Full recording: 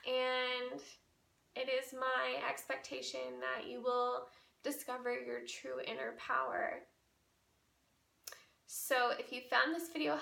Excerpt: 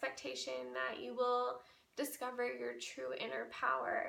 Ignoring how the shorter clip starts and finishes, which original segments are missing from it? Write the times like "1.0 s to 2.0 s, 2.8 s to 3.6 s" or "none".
none